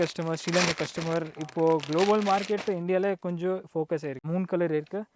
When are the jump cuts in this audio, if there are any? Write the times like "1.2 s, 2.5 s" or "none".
4.2 s